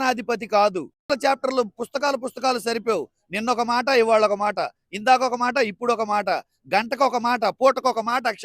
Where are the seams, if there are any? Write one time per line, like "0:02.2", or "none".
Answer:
0:01.1